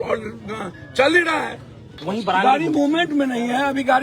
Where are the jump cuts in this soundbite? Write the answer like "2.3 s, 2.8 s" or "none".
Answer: 1.9 s